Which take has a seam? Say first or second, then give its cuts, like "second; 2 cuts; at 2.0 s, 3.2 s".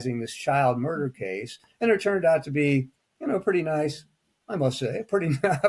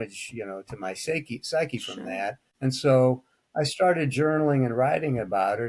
second; 1 cut; at 2.4 s